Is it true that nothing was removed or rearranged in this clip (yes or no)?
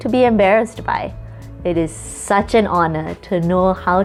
yes